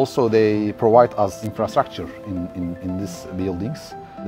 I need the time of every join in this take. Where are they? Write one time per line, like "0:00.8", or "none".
0:01.4